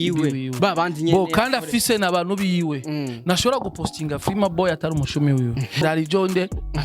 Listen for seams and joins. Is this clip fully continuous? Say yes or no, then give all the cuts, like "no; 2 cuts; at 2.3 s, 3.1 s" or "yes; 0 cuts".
no; 1 cut; at 5.8 s